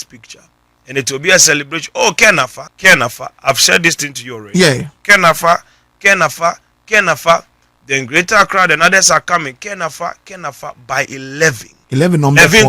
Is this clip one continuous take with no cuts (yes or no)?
no